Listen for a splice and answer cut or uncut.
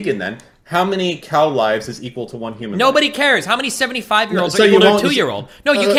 uncut